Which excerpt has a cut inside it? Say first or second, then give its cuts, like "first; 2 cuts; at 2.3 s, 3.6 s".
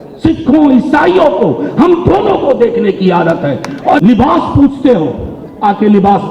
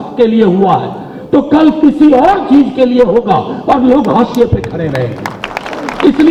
first; 1 cut; at 4.0 s